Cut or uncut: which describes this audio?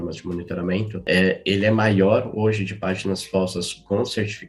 cut